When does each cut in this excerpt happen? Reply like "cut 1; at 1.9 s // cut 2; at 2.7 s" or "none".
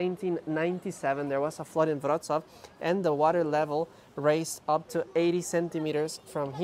none